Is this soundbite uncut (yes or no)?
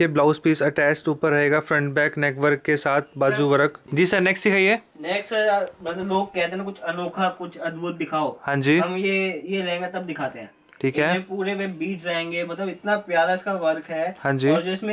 no